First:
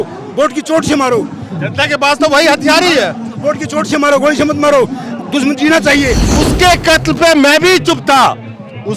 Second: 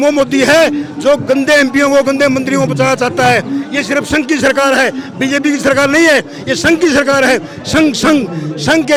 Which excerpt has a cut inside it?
first; 1 cut; at 6.2 s

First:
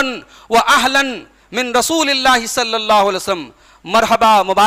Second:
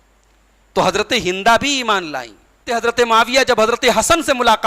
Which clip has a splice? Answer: second; 1 cut; at 2.7 s

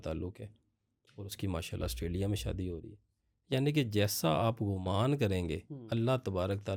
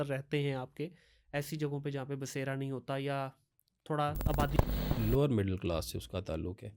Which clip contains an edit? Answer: second; 1 cut; at 4.5 s

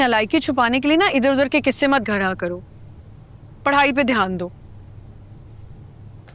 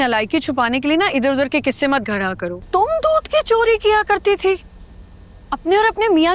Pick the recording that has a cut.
second; 1 cut; at 2.6 s

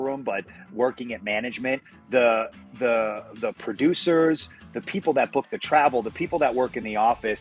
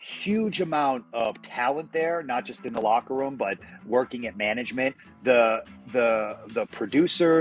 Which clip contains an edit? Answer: second; 1 cut; at 1.1 s

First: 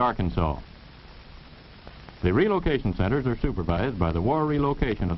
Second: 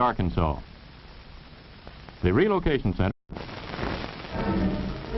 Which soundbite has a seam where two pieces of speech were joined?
first; 1 cut; at 3.1 s

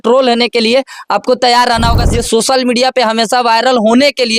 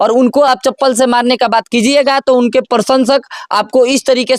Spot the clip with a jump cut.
first; 1 cut; at 2.0 s

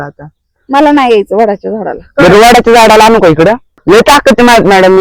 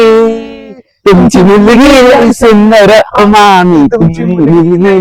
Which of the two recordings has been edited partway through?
first; 1 cut; at 3.8 s

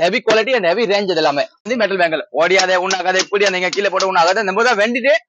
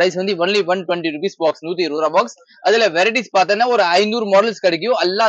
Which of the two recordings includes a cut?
first; 1 cut; at 1.7 s

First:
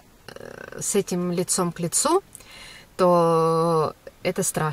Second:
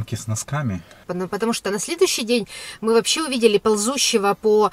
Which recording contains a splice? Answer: second; 1 cut; at 1.0 s

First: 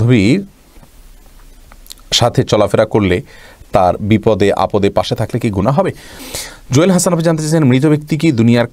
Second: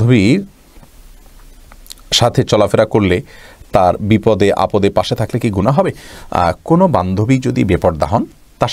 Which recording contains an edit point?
first; 1 cut; at 6.1 s

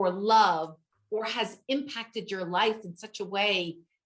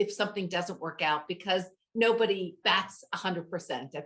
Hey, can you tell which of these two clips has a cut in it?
second; 1 cut; at 2.6 s

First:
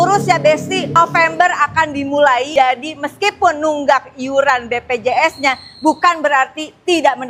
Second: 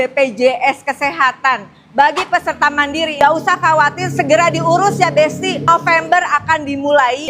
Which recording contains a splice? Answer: second; 1 cut; at 3.1 s

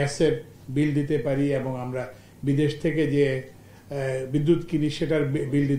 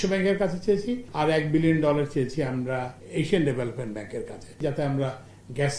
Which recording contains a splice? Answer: second; 3 cuts; at 1.0 s, 3.0 s, 4.6 s

